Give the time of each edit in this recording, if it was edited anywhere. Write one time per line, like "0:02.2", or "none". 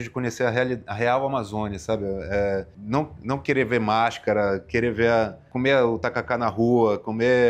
0:02.8
0:05.4